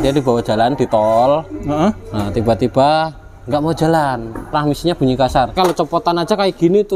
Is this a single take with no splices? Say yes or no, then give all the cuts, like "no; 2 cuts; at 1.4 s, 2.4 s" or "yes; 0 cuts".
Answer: no; 2 cuts; at 4.5 s, 5.6 s